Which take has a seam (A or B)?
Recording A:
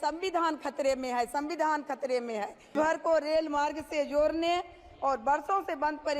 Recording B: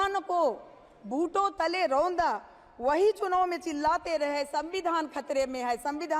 A